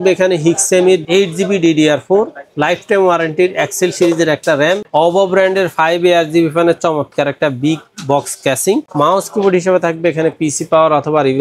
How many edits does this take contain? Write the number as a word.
two